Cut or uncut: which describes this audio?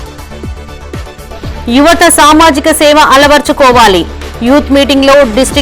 cut